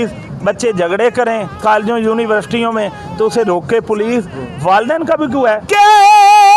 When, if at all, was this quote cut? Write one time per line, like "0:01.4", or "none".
0:05.7